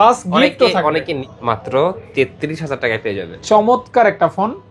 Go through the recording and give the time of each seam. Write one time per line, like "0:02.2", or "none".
0:01.2

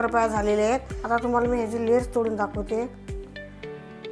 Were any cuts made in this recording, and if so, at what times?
0:00.9
0:02.9

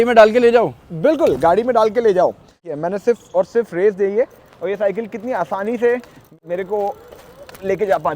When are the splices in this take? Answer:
0:02.7
0:06.2

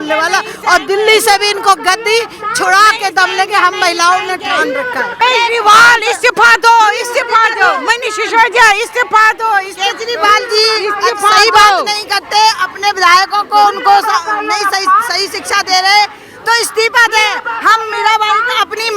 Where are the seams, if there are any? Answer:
0:05.2

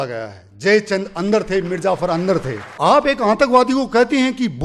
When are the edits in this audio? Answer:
0:02.6

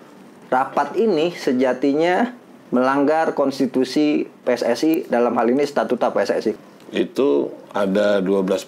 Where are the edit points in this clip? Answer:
0:06.6

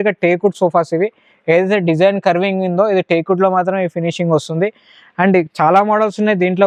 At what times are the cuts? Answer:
none

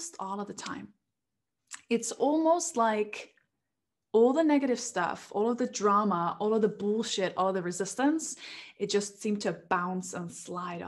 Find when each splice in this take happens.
none

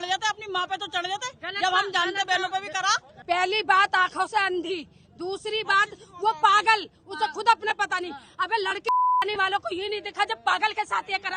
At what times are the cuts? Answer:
0:03.1

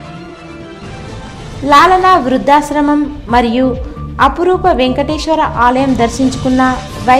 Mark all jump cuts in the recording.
0:01.4

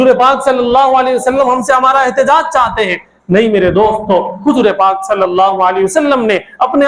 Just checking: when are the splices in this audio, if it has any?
none

